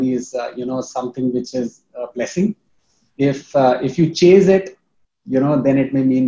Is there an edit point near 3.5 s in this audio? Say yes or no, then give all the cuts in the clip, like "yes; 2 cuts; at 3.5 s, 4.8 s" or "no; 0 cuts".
no; 0 cuts